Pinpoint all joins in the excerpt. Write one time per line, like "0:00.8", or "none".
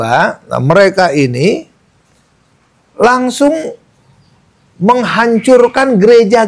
none